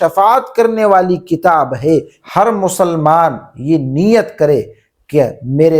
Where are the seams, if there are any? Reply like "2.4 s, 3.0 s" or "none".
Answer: 2.2 s